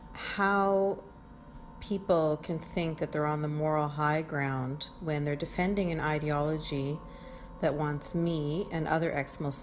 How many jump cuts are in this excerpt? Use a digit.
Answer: 0